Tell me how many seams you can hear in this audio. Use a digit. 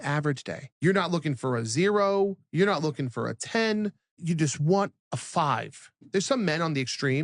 1